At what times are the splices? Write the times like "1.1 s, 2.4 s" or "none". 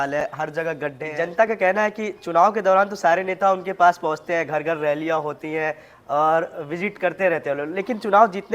1.0 s